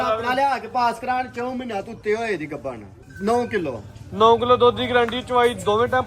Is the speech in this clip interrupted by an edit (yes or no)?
yes